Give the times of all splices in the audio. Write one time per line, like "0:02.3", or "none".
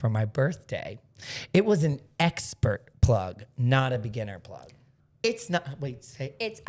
0:05.1